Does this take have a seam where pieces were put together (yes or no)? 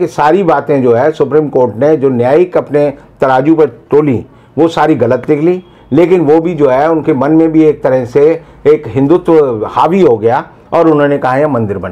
no